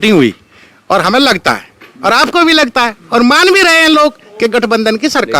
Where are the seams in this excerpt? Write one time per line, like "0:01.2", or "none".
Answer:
0:01.2